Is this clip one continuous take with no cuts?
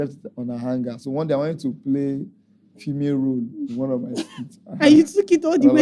yes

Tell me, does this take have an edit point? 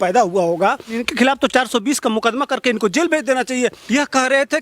yes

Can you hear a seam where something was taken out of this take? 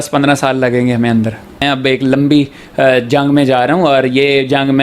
yes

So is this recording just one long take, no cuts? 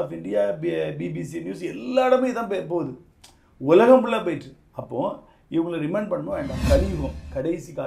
no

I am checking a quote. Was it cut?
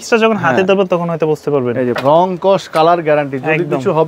yes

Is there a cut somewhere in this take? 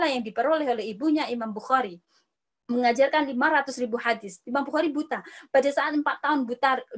no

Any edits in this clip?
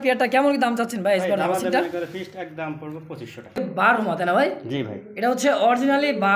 yes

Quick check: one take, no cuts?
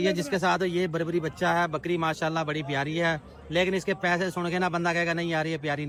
yes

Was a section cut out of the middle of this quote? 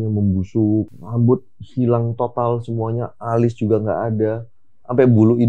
yes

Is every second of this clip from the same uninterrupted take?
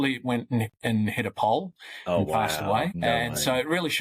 no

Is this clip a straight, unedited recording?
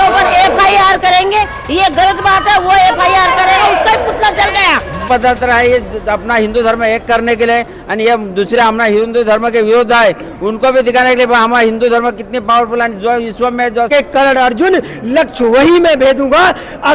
no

